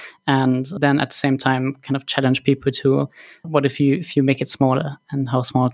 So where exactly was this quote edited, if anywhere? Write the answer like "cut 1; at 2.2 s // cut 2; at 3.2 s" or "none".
none